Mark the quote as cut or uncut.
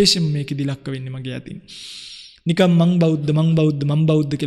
uncut